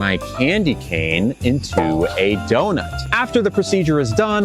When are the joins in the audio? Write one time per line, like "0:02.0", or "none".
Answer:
none